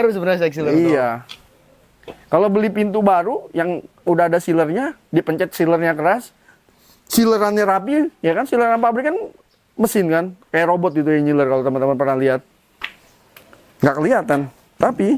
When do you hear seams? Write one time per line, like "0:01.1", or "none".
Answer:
none